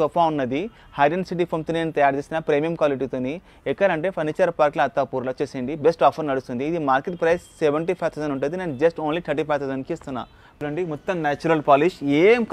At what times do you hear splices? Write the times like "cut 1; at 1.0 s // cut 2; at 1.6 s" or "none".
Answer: cut 1; at 10.5 s